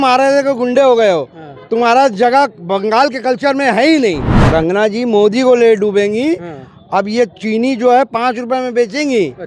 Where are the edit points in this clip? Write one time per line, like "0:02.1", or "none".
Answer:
0:04.3